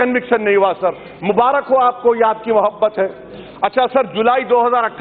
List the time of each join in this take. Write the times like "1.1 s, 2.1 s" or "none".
none